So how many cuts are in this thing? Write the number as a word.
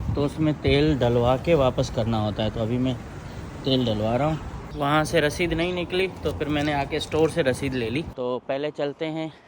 two